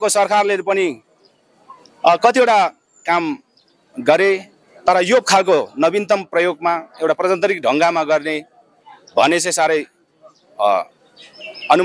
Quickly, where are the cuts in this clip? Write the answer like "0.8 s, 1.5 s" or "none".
none

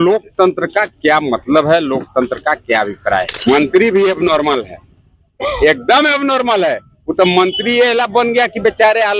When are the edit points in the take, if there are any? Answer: 3.3 s

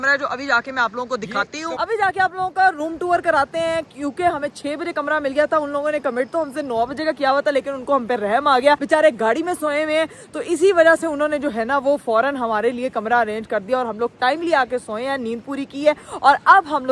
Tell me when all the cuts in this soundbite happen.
none

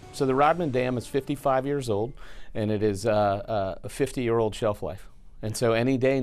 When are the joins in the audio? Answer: none

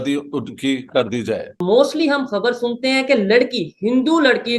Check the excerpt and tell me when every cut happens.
1.6 s

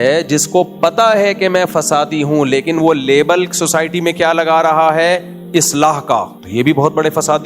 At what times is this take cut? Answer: 6.4 s

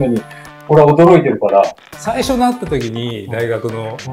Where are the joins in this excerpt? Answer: 1.9 s

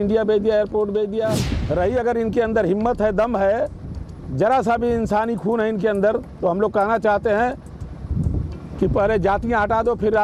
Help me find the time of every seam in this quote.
1.5 s

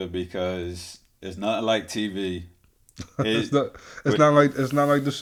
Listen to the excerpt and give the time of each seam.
none

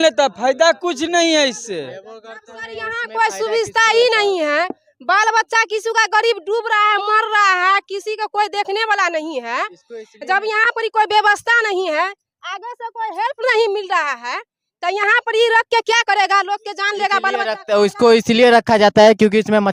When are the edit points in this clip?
none

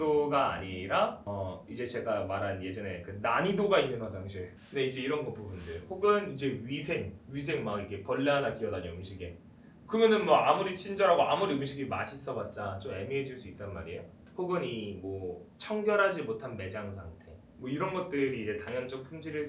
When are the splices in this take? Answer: none

